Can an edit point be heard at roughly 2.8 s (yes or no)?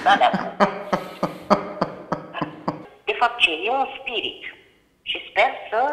yes